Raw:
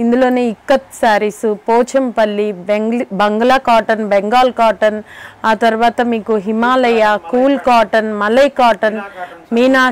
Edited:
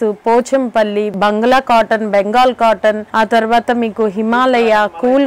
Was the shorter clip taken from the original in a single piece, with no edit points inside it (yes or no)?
no